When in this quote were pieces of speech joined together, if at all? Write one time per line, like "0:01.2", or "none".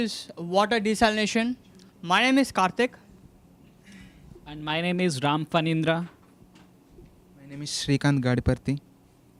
none